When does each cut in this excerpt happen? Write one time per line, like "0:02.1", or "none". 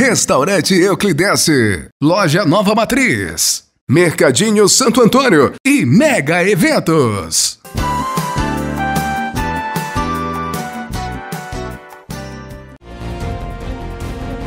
0:12.9